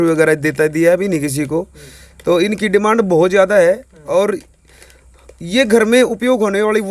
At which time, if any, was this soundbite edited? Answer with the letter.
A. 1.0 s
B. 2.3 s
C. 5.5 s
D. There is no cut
D